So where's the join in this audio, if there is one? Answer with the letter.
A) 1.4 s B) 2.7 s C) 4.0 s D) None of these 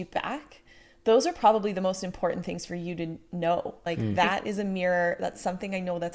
C